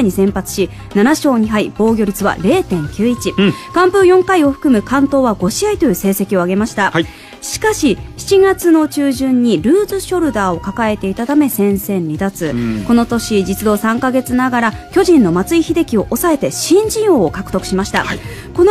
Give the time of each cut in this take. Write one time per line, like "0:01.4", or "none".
none